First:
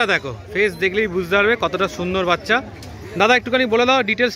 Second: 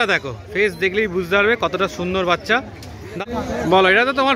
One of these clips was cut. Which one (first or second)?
second